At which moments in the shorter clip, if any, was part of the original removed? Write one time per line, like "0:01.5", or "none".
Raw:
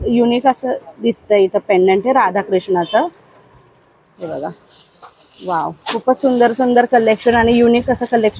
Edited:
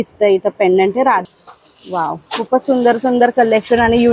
0:01.2